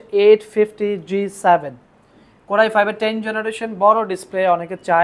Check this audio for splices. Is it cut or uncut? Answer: uncut